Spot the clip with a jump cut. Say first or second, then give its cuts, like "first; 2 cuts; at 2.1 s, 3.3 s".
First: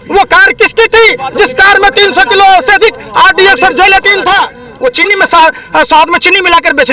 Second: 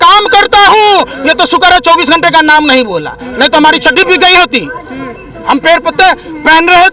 first; 1 cut; at 4.6 s